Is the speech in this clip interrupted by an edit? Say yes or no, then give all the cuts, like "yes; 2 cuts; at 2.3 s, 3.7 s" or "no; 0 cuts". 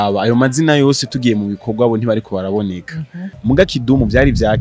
yes; 1 cut; at 3.3 s